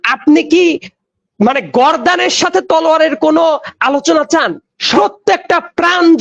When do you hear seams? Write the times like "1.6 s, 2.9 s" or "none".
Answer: 4.9 s